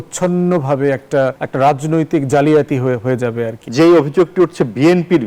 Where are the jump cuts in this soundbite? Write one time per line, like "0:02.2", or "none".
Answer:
0:01.4
0:03.6